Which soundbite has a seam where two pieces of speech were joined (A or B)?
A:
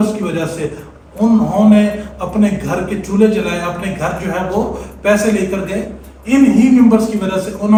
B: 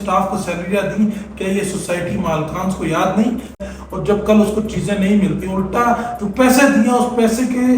B